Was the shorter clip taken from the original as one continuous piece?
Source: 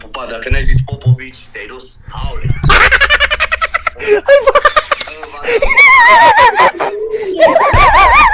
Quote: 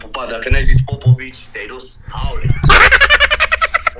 yes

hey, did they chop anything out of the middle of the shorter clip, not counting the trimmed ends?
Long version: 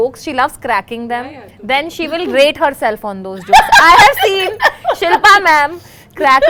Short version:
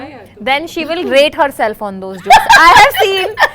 no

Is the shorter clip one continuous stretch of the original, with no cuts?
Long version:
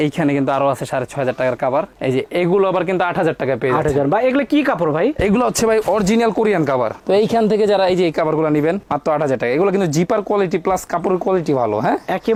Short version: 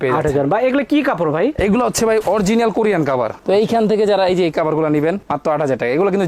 yes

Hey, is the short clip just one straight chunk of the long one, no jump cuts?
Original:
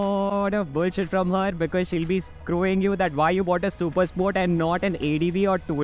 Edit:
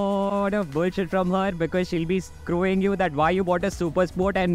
yes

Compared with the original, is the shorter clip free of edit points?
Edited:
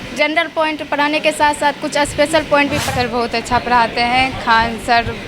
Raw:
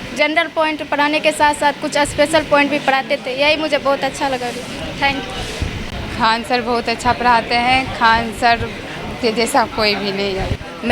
no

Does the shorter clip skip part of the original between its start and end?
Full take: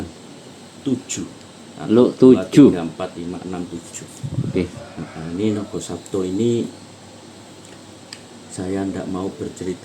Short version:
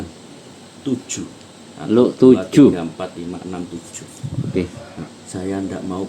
yes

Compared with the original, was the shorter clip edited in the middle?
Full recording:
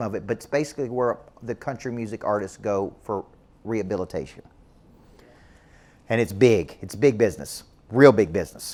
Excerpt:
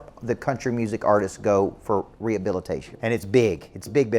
yes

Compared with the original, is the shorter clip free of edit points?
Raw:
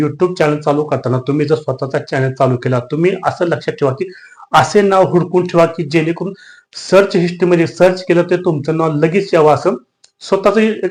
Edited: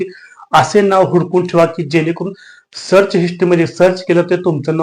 yes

